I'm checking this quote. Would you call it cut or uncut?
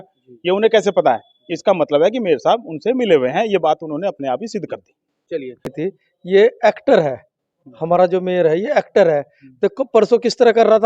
cut